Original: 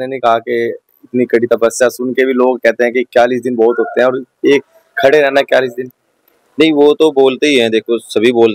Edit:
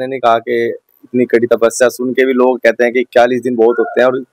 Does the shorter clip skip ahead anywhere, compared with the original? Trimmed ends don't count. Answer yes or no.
no